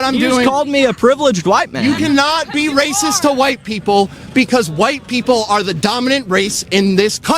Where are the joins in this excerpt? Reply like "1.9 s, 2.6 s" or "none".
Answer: none